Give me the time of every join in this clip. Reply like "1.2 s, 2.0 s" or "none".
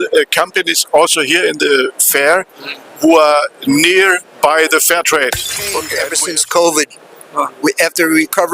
6.0 s

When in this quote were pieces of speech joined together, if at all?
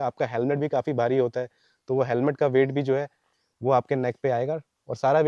none

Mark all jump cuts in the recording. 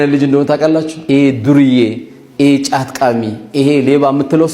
0.9 s

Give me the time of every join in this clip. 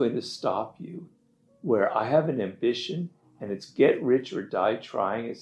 none

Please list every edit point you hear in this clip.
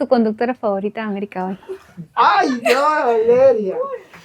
none

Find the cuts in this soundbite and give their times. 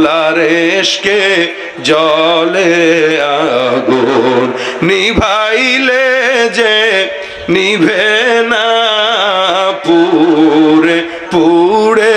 none

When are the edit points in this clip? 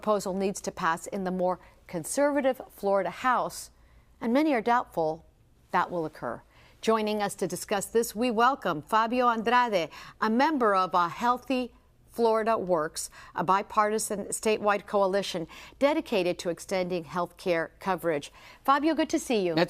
1.8 s

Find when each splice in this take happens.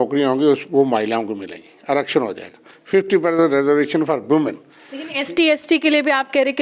none

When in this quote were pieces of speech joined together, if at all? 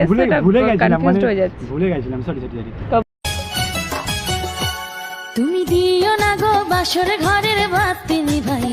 2.8 s

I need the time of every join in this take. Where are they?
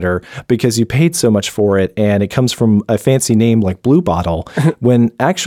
none

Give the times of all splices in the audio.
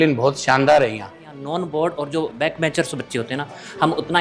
1.2 s, 2.4 s

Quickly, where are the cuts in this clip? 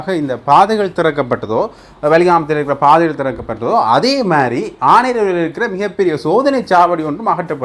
none

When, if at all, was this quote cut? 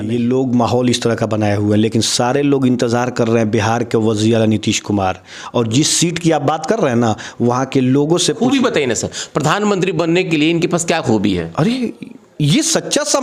none

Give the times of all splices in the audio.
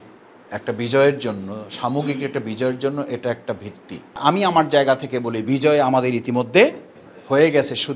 4.2 s

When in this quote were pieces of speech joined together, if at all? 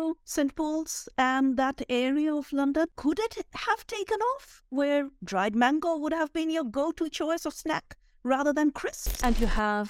2.9 s, 9.1 s

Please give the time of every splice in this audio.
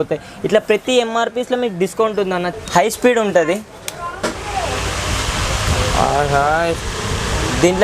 2.5 s

